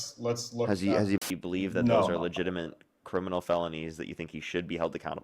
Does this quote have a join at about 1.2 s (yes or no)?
yes